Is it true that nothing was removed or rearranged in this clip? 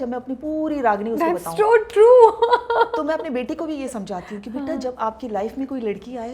yes; 0 cuts

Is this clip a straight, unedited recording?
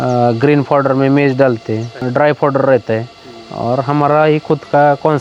no; 1 cut; at 2.0 s

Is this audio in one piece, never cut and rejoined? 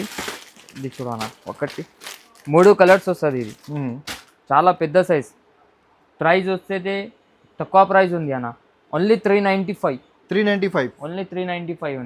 yes; 0 cuts

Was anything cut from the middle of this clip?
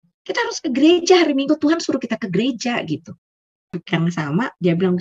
yes; 1 cut; at 3.8 s

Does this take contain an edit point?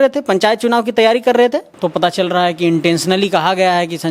yes; 1 cut; at 1.7 s

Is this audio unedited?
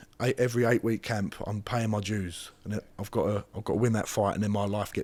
yes; 0 cuts

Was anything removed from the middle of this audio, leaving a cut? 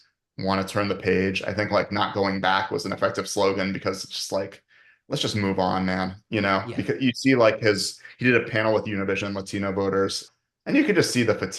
yes; 1 cut; at 10.2 s

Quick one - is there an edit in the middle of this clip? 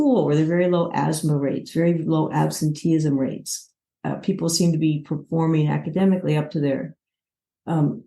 no; 0 cuts

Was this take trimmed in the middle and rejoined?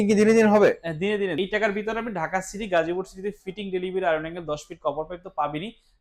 yes; 1 cut; at 1.3 s

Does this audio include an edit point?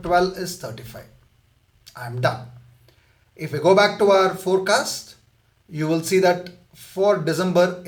no; 0 cuts

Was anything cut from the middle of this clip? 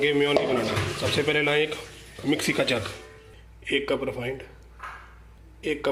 no; 0 cuts

